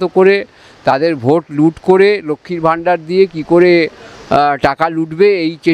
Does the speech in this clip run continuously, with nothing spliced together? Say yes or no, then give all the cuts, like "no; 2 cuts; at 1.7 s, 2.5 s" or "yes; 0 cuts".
yes; 0 cuts